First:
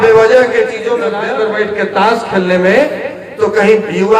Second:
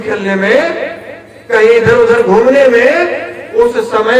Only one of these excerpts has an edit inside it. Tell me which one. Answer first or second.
first